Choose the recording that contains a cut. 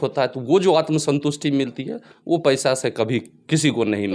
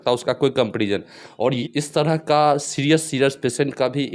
second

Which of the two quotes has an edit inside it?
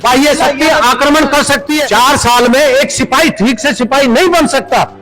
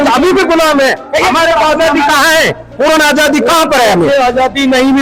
first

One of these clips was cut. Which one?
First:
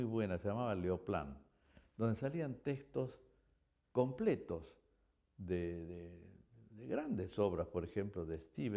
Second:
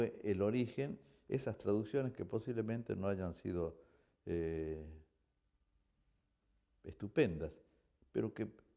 first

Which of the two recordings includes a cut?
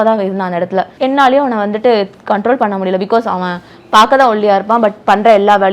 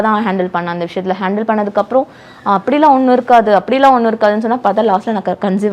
first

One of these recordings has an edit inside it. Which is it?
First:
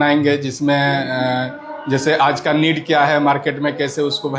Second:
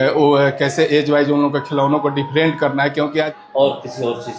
second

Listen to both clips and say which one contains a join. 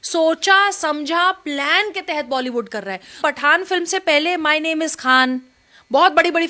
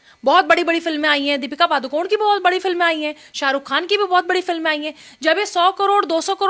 first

